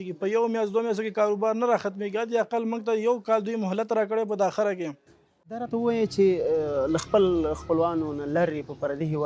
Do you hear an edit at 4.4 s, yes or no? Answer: no